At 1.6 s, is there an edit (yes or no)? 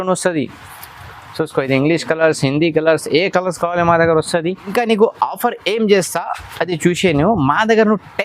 no